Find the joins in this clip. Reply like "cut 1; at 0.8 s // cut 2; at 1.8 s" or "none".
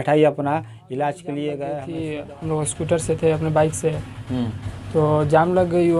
cut 1; at 1.9 s